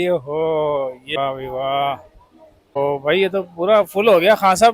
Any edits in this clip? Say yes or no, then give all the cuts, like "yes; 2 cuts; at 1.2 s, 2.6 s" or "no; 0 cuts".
yes; 2 cuts; at 1.2 s, 2.8 s